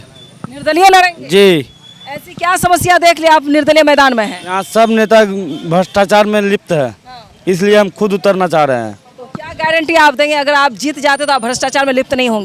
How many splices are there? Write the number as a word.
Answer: zero